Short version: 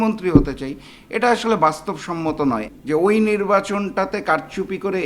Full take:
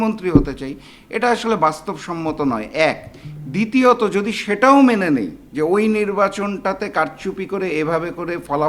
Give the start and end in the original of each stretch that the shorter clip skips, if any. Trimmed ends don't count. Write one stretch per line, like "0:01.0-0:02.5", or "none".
0:02.7-0:05.3